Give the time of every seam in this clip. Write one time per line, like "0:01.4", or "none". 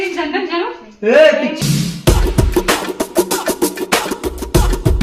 0:01.5